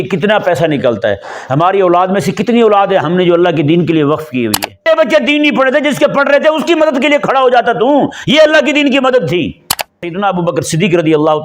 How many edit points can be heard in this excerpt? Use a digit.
2